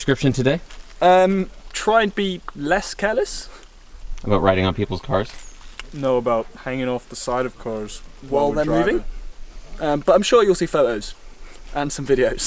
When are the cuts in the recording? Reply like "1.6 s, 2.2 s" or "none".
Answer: 1.6 s